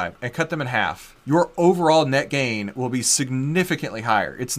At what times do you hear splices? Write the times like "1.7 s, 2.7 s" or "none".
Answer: 1.1 s